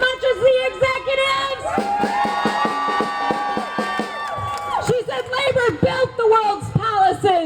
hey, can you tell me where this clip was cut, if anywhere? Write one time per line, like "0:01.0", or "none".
none